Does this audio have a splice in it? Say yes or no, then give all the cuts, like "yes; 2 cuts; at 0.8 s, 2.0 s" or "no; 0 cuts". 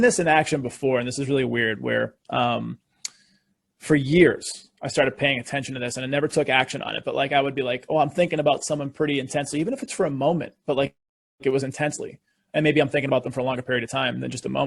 no; 0 cuts